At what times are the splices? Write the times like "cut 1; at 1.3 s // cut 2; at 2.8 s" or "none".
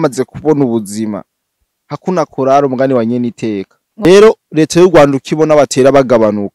cut 1; at 4.1 s